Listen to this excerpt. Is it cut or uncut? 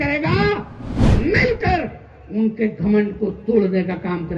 cut